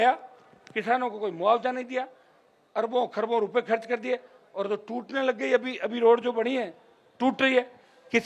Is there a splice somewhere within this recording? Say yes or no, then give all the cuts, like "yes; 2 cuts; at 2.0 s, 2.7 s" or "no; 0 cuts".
no; 0 cuts